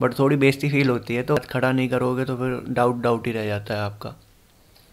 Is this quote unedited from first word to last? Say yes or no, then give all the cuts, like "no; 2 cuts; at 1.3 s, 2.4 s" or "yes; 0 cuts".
no; 1 cut; at 1.4 s